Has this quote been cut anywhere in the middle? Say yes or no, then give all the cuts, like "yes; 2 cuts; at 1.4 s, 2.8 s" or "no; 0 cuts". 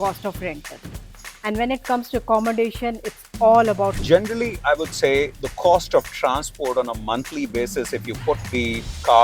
yes; 1 cut; at 4.0 s